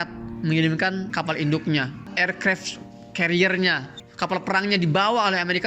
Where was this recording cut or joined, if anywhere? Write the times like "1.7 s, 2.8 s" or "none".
1.1 s